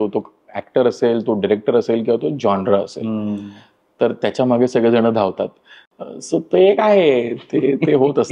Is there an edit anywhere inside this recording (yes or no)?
no